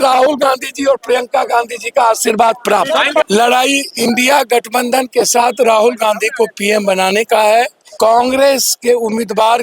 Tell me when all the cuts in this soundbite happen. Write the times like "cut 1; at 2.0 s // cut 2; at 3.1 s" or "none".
cut 1; at 3.2 s // cut 2; at 7.8 s